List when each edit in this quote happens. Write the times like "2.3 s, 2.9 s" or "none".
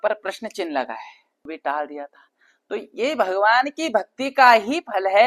1.4 s